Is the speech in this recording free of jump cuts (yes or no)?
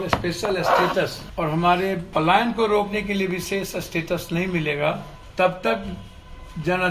no